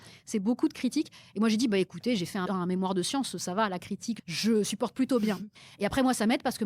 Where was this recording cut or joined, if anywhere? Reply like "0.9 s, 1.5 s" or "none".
2.5 s, 4.2 s, 5.5 s